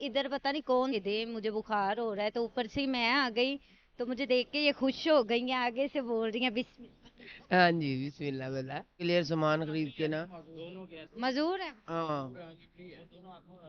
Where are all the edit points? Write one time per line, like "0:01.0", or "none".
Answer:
0:01.0
0:09.0